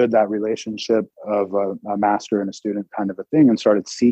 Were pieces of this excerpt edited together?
yes; 1 cut; at 1.1 s

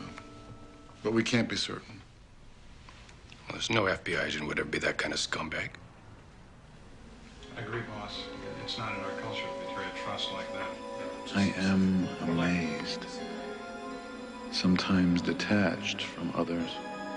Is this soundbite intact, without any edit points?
yes; 0 cuts

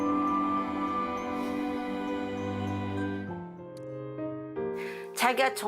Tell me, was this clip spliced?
yes; 1 cut; at 3.3 s

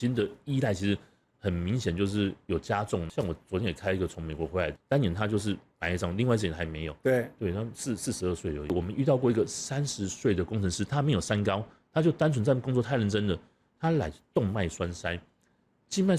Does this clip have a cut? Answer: yes; 3 cuts; at 3.1 s, 4.8 s, 8.7 s

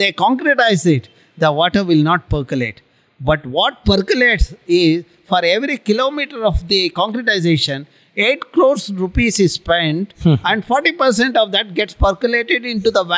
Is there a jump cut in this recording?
no; 0 cuts

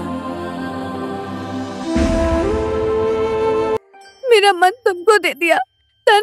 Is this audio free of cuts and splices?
no; 1 cut; at 3.8 s

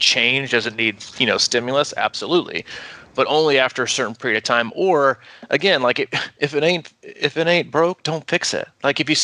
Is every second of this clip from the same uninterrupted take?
yes; 0 cuts

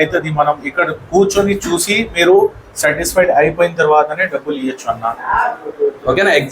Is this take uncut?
yes; 0 cuts

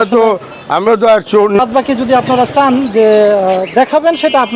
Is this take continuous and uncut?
no; 1 cut; at 1.6 s

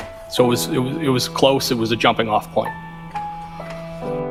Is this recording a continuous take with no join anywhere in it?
yes; 0 cuts

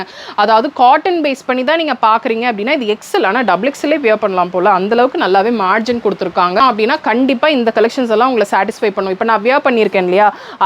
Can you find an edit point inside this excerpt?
yes; 1 cut; at 6.6 s

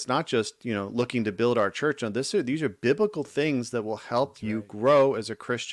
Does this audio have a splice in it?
no; 0 cuts

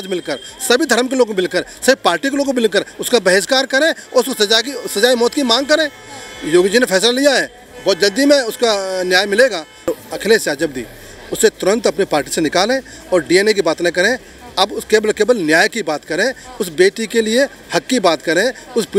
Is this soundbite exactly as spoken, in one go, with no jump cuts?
no; 1 cut; at 9.9 s

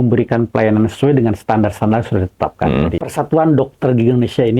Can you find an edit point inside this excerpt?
yes; 1 cut; at 3.0 s

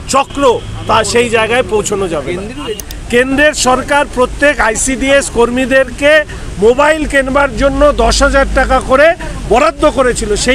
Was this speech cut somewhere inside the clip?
yes; 1 cut; at 2.9 s

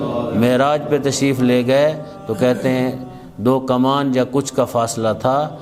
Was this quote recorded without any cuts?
yes; 0 cuts

